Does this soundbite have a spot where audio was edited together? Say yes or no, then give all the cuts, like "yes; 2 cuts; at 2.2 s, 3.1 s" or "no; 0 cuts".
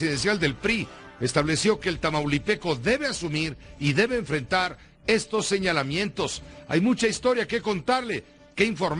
no; 0 cuts